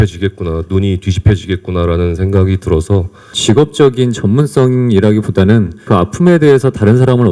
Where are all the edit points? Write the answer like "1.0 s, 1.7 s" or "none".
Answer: 3.4 s, 5.8 s